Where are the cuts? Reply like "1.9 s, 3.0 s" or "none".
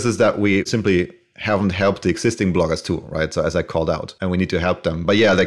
4.1 s